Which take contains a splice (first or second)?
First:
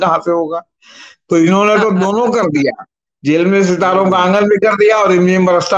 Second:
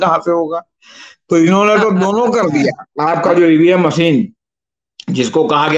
second